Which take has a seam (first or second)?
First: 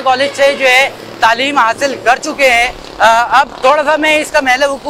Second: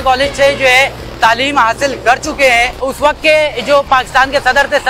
second